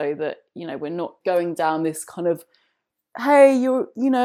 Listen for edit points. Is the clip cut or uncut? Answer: cut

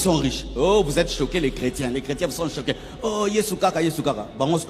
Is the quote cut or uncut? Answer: uncut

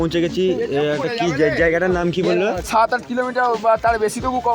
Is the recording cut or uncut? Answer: cut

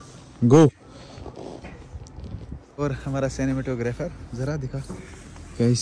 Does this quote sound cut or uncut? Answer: cut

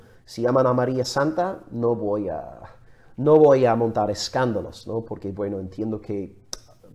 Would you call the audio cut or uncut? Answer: uncut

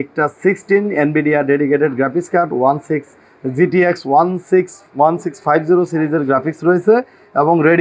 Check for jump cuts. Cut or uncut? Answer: uncut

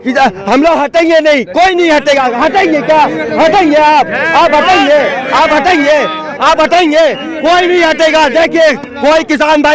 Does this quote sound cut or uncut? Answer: uncut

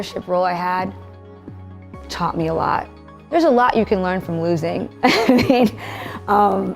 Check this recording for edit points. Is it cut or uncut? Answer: cut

